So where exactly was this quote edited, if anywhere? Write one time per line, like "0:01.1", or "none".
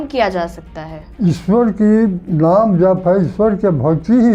none